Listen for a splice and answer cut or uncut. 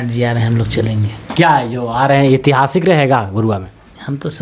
uncut